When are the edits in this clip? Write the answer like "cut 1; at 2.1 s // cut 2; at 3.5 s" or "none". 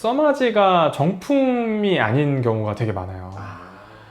none